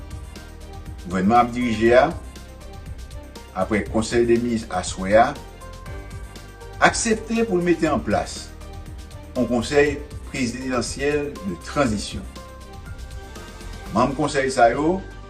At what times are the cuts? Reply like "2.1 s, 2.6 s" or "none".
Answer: 1.0 s